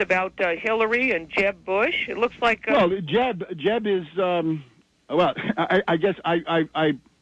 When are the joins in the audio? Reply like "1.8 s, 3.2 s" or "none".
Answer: none